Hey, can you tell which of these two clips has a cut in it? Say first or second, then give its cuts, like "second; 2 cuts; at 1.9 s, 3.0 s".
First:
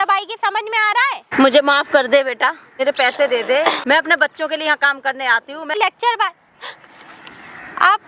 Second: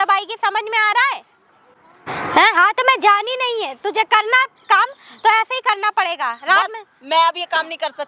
first; 4 cuts; at 1.3 s, 2.7 s, 3.8 s, 5.7 s